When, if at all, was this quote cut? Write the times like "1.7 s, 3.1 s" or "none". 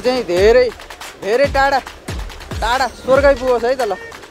none